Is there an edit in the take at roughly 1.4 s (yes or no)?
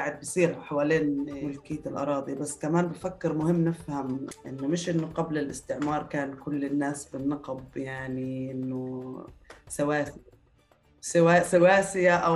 yes